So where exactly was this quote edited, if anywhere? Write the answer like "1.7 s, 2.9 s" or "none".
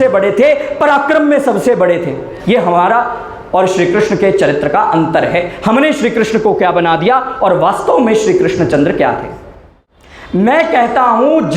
10.4 s